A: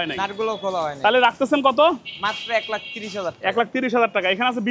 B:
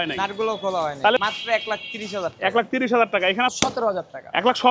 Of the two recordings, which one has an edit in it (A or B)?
B